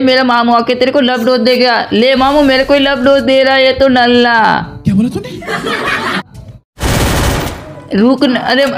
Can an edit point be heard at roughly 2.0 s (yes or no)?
no